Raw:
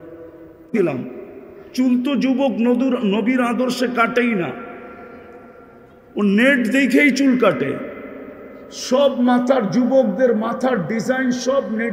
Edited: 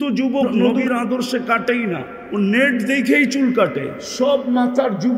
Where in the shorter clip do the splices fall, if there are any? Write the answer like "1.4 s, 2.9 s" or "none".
0.8 s, 2.2 s, 4.0 s